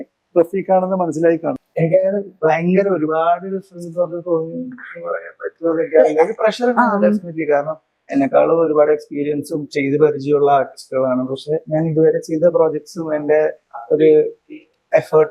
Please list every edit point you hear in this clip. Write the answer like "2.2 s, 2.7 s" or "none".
1.5 s

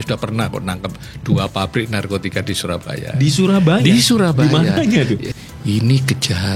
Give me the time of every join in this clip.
5.3 s

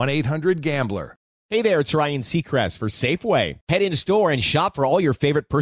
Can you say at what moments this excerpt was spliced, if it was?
1.4 s

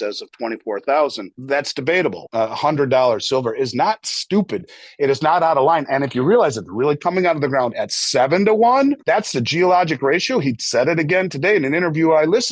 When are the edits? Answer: 1.3 s, 2.2 s, 9.0 s

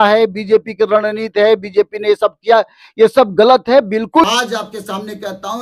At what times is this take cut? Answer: 4.2 s

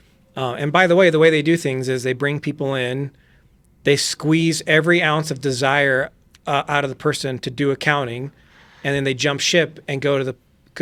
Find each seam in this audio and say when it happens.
none

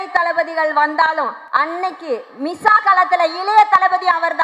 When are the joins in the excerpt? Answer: 1.4 s

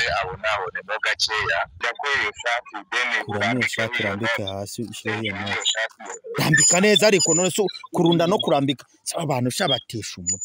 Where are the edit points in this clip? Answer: 1.8 s

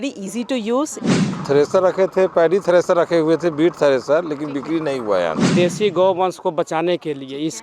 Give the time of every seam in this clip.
1.4 s, 5.5 s

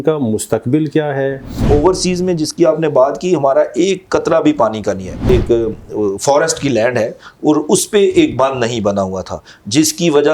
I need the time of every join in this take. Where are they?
1.6 s, 5.3 s

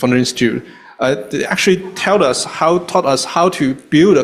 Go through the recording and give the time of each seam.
none

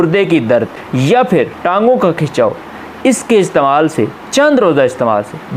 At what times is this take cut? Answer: 1.2 s

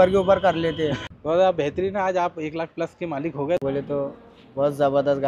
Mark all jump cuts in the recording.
1.0 s, 3.6 s

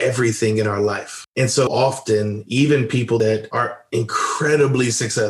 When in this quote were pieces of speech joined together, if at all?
3.2 s

